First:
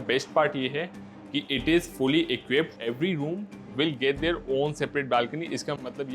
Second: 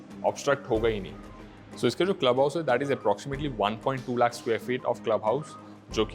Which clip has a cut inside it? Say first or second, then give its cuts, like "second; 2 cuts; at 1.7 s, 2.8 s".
first; 1 cut; at 2.7 s